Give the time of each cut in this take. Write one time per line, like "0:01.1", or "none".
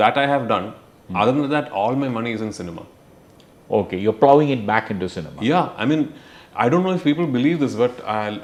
none